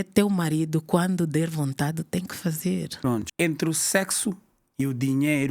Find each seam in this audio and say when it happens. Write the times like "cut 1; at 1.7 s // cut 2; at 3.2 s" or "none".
cut 1; at 3.3 s